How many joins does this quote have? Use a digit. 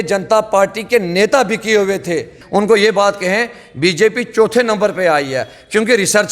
1